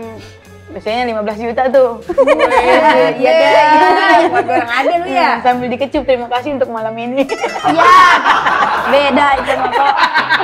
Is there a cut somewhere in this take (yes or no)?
no